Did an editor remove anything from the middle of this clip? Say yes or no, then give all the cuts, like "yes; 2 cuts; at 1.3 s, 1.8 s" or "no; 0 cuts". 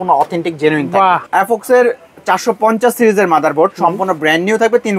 yes; 1 cut; at 1.2 s